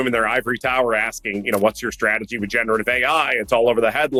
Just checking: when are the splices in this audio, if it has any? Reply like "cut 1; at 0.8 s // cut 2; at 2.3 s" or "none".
none